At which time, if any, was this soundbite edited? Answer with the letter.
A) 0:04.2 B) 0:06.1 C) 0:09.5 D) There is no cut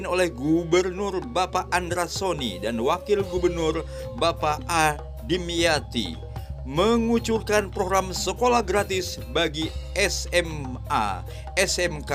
D